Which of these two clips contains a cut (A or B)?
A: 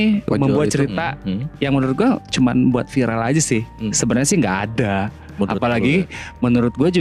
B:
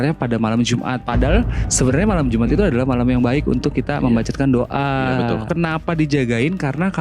B